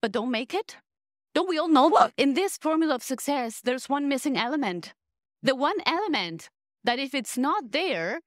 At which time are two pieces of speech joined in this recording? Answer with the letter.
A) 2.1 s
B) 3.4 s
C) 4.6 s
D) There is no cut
A